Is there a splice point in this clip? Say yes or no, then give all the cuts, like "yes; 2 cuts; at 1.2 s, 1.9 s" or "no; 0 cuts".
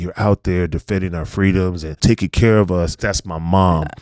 yes; 2 cuts; at 2.0 s, 3.0 s